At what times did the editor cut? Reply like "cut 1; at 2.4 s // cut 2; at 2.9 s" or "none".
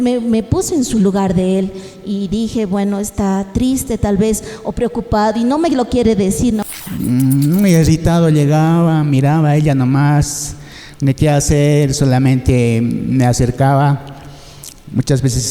cut 1; at 6.7 s